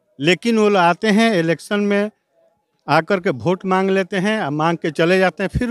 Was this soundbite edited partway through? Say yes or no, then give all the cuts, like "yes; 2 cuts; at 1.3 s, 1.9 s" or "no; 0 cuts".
no; 0 cuts